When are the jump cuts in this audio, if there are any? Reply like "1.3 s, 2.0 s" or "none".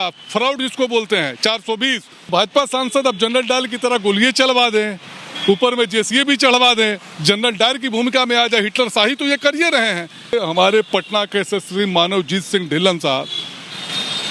2.3 s, 10.3 s